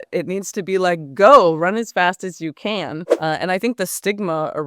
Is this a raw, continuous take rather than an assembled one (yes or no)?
no